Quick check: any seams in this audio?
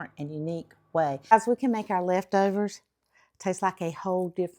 yes; 1 cut; at 1.2 s

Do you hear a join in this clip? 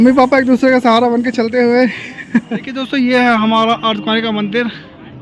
yes; 1 cut; at 2.9 s

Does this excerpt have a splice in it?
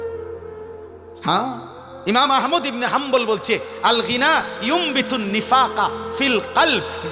yes; 1 cut; at 1.1 s

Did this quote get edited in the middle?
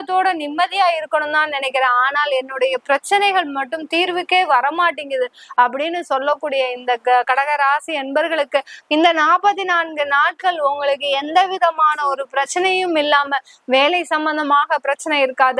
no; 0 cuts

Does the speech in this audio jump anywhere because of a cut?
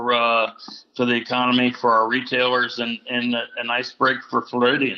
no; 0 cuts

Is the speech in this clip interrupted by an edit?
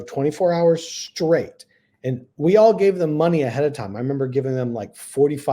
no; 0 cuts

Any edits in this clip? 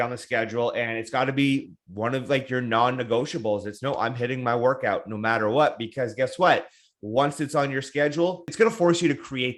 yes; 1 cut; at 8.5 s

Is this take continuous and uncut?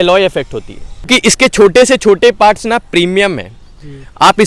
no; 1 cut; at 1.1 s

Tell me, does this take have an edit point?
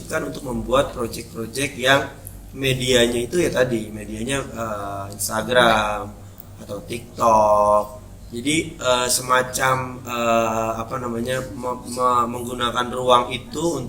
no; 0 cuts

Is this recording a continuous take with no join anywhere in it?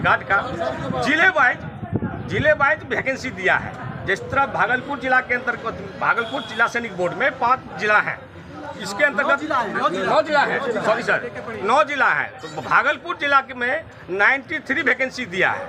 yes; 0 cuts

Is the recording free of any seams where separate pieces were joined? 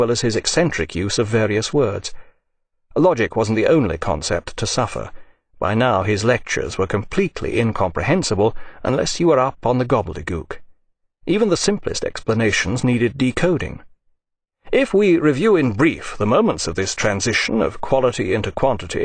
yes; 0 cuts

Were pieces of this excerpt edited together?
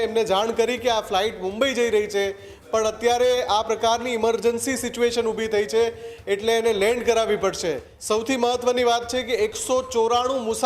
yes; 1 cut; at 7.9 s

